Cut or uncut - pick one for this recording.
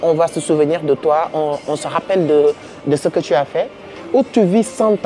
uncut